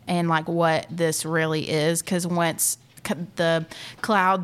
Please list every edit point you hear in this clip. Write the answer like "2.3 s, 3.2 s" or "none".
none